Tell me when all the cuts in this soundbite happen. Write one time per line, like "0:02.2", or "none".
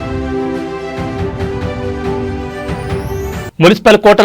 0:02.2